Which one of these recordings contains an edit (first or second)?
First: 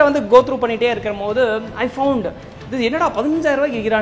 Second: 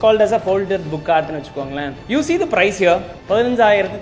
second